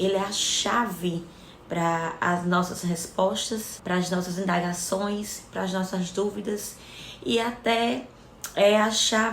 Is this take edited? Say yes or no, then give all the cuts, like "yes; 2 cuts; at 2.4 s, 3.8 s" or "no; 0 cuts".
yes; 1 cut; at 3.7 s